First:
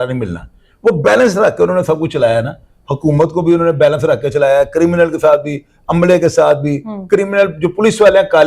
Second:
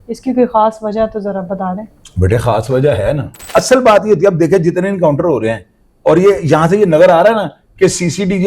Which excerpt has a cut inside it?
second; 1 cut; at 3.3 s

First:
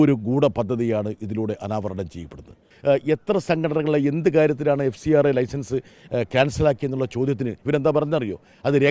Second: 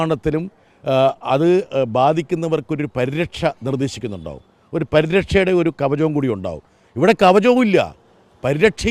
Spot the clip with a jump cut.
first; 1 cut; at 2.7 s

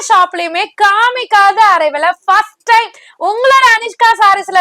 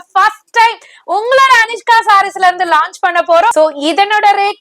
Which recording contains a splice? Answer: second; 1 cut; at 3.5 s

